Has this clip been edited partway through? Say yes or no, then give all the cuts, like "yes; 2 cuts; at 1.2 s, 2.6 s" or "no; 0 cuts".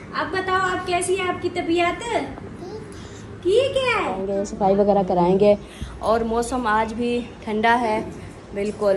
yes; 1 cut; at 4.4 s